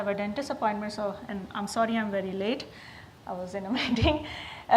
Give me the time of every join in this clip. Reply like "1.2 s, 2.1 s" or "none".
2.5 s